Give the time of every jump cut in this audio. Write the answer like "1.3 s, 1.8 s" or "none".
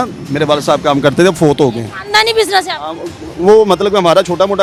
none